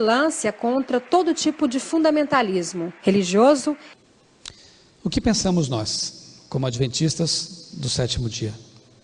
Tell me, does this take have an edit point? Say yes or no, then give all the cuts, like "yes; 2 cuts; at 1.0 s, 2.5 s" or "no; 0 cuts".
yes; 1 cut; at 3.9 s